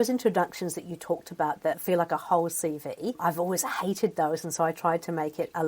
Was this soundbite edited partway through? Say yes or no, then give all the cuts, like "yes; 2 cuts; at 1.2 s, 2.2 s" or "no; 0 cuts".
yes; 2 cuts; at 1.8 s, 3.2 s